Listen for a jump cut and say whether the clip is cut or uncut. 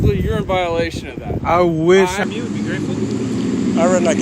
cut